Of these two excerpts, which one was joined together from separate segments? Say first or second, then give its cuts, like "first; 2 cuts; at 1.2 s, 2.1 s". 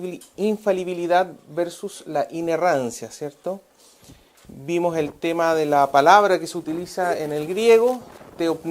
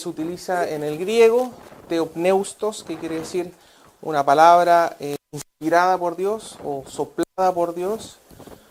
first; 1 cut; at 4.6 s